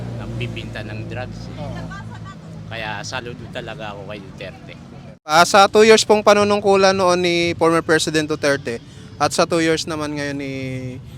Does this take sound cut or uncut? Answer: cut